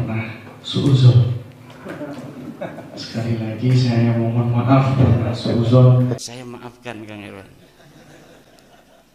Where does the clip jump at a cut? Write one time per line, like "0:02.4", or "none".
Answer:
0:06.2